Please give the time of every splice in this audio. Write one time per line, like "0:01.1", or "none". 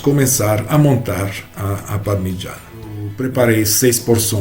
0:03.0